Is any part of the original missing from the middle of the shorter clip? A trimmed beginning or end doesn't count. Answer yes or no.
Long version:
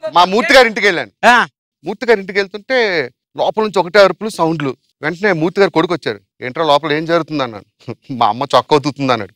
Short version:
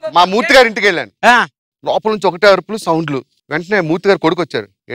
yes